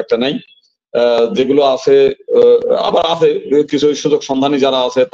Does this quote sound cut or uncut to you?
uncut